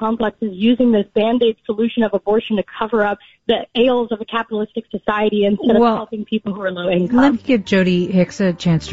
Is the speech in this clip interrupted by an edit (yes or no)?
no